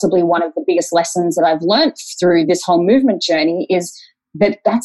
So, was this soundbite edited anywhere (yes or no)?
yes